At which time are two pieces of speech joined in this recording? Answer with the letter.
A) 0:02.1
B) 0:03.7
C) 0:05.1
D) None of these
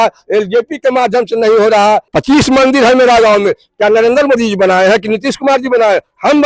A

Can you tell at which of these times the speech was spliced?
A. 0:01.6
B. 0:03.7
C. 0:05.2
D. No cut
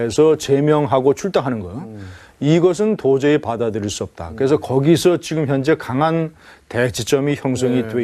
A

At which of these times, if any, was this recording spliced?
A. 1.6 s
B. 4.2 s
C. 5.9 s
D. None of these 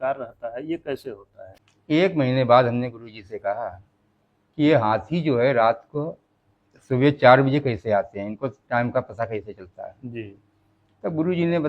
A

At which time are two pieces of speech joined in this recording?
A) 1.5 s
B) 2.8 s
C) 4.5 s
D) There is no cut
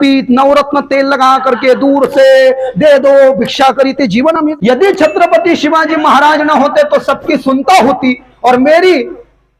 C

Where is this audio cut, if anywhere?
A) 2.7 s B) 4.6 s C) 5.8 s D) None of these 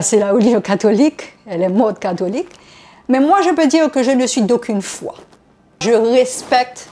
C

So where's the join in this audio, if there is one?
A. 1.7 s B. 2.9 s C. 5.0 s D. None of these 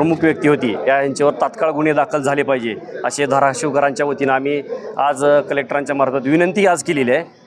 D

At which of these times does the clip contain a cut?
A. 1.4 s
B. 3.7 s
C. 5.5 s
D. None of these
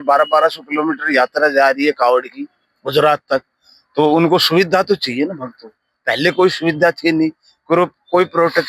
D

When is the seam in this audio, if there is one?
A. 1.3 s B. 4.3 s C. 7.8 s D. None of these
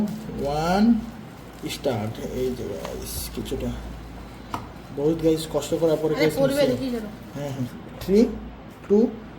C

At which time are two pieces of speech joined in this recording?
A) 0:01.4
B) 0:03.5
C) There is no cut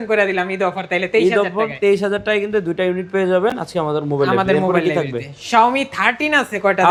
C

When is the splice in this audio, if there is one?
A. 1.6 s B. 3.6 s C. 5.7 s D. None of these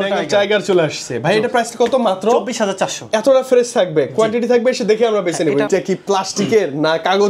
C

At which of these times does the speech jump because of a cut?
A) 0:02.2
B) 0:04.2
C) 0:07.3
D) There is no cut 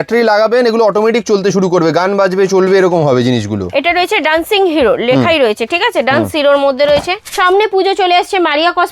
C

